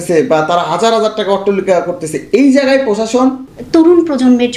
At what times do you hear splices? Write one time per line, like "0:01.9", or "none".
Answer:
0:03.5